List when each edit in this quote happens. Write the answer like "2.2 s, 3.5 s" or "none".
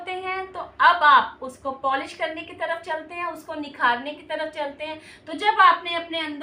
none